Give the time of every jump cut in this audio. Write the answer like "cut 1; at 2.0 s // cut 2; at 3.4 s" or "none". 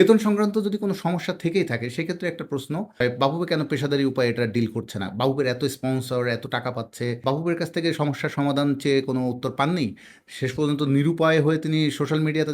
cut 1; at 2.9 s // cut 2; at 7.2 s